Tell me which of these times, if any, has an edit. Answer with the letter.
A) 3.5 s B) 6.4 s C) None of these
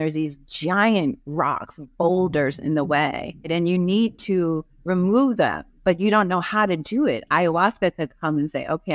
A